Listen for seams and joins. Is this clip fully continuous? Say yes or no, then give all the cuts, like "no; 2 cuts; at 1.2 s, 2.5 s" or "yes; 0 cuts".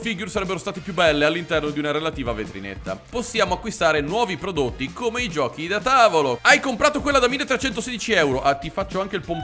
no; 2 cuts; at 3.0 s, 6.4 s